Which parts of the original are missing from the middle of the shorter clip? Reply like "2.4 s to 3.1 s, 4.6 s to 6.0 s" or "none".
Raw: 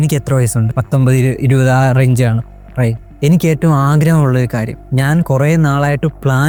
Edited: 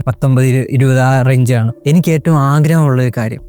2.4 s to 3.1 s